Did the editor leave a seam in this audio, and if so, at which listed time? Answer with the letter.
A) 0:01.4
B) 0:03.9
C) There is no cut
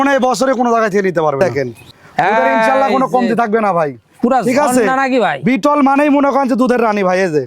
A